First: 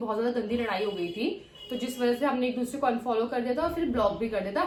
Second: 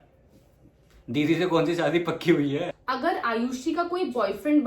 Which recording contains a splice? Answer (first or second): second